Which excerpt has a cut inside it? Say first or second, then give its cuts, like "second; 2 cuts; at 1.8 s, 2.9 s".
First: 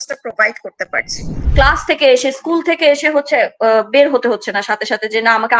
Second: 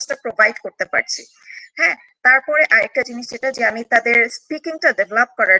first; 1 cut; at 1.4 s